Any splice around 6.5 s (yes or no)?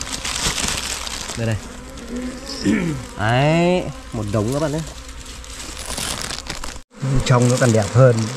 yes